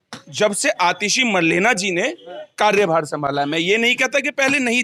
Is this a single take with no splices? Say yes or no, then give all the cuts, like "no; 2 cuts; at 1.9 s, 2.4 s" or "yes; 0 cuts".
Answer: yes; 0 cuts